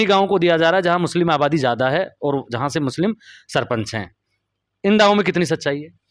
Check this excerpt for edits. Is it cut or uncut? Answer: uncut